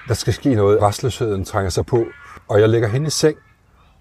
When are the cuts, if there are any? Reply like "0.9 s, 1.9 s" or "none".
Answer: 0.8 s, 2.3 s